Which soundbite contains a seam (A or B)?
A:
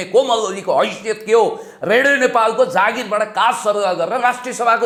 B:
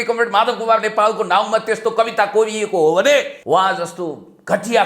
B